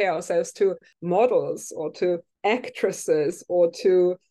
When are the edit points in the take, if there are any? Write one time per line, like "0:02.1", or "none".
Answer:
0:00.9
0:02.3